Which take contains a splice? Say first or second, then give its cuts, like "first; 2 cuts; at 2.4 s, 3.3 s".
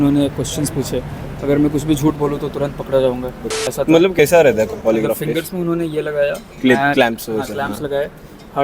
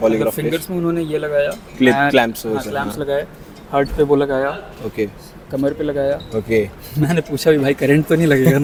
first; 1 cut; at 3.5 s